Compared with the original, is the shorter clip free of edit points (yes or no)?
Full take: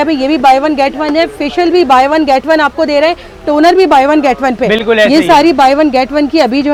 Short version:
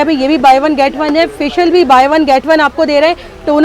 yes